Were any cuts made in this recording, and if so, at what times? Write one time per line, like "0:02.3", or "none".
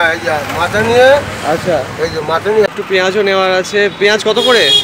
0:02.7